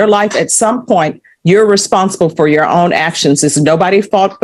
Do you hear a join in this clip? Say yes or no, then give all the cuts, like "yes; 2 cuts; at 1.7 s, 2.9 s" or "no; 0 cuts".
no; 0 cuts